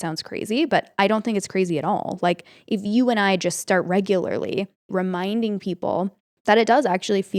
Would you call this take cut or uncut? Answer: cut